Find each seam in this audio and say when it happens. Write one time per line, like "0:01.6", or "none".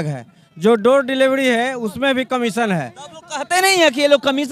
none